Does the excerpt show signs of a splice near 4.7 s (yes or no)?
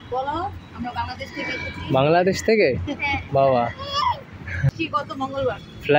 yes